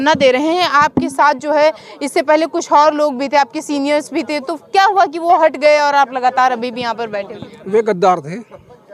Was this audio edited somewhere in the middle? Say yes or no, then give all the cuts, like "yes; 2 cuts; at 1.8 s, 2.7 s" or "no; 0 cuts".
no; 0 cuts